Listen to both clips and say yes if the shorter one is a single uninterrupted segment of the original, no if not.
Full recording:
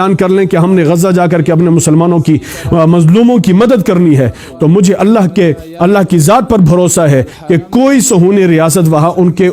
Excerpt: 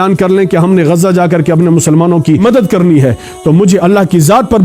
no